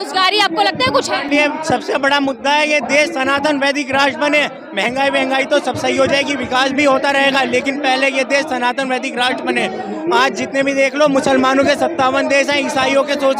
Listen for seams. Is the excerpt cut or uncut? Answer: uncut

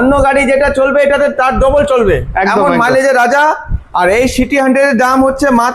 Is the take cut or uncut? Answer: uncut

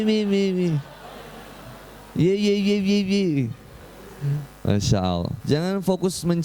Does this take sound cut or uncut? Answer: cut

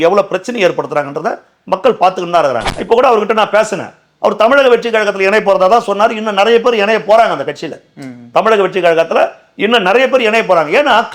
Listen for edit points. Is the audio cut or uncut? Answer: cut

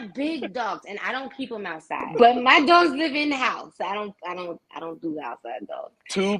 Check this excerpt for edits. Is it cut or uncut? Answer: cut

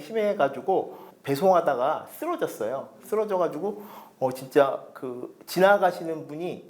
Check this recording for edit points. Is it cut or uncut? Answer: cut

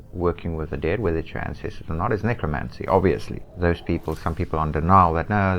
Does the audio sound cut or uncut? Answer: cut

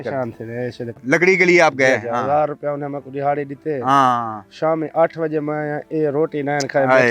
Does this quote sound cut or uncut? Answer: cut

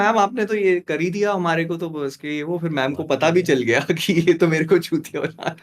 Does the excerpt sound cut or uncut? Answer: uncut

